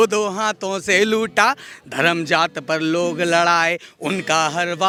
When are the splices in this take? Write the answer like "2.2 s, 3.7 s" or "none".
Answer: none